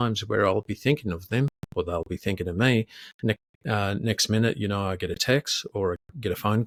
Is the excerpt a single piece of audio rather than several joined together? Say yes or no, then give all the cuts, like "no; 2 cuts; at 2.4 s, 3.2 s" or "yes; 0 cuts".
yes; 0 cuts